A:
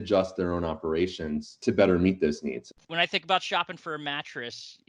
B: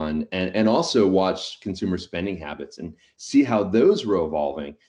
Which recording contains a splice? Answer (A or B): A